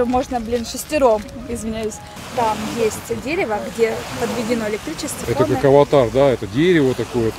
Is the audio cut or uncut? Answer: cut